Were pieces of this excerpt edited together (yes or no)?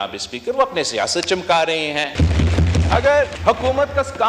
yes